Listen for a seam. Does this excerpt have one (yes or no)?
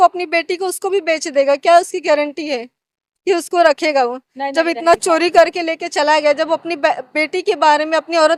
no